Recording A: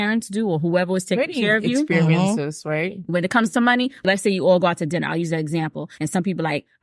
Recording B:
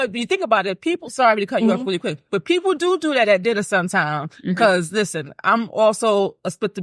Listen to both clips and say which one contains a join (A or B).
A